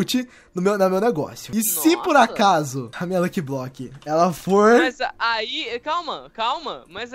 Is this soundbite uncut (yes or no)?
no